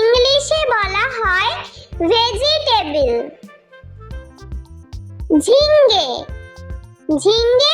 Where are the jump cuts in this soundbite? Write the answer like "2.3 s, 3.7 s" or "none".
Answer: 3.4 s, 4.8 s